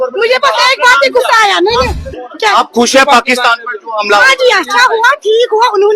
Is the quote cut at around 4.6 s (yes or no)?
no